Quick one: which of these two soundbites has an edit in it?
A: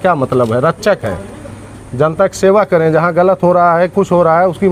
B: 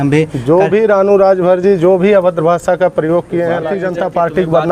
B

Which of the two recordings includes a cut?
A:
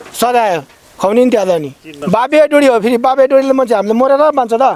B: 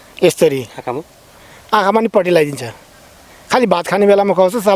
A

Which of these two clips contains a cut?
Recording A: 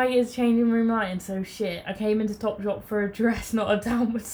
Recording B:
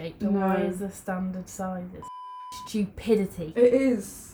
B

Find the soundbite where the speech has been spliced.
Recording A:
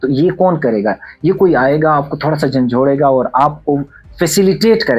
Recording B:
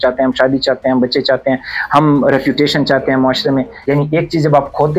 B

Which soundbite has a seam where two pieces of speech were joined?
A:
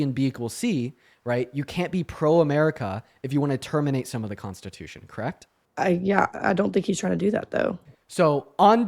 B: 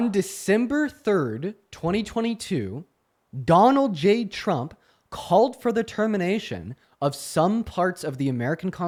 A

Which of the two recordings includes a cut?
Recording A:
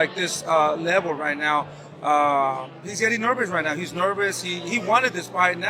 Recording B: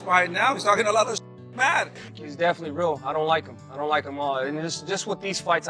B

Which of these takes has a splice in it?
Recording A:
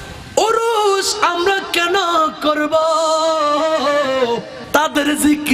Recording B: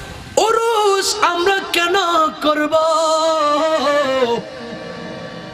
A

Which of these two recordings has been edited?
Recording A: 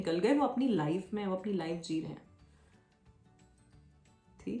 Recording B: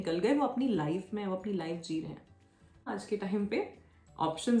B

